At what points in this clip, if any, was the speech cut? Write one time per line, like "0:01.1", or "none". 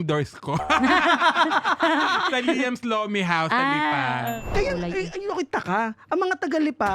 0:04.5